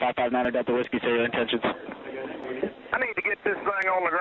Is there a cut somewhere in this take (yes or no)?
no